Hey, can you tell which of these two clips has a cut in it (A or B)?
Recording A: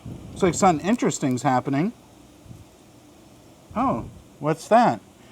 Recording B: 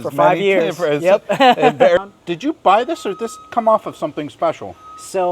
B